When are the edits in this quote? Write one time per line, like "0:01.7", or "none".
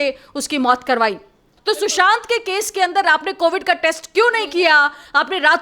0:01.5